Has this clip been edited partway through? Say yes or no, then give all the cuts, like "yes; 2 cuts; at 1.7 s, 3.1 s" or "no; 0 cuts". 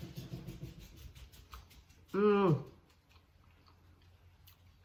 no; 0 cuts